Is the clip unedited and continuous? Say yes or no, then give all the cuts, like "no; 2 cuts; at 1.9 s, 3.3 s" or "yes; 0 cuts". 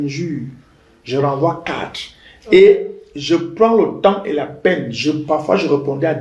yes; 0 cuts